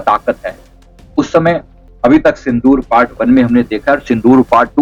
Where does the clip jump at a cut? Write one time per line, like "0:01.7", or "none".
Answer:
0:01.8